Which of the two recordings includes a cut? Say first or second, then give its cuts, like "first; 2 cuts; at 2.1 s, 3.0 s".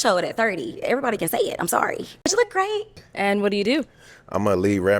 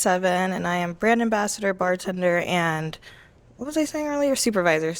first; 2 cuts; at 2.3 s, 3.0 s